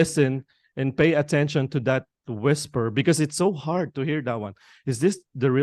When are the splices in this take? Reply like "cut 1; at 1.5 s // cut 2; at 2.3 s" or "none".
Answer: none